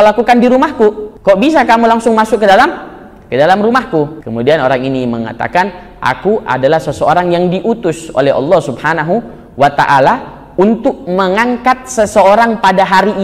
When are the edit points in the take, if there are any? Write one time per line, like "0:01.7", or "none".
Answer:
0:01.1
0:04.2